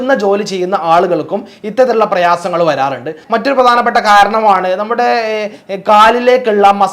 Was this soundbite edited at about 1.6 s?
no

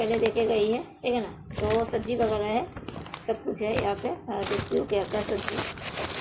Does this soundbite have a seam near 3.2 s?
no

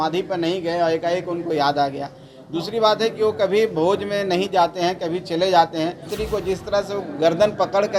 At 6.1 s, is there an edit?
yes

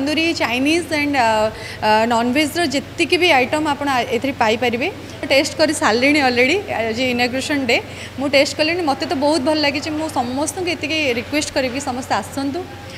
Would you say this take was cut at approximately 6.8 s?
no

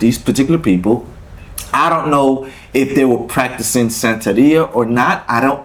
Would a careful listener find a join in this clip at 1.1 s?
no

